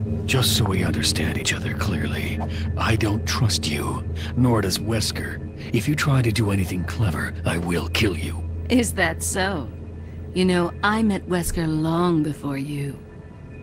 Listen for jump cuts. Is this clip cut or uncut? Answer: uncut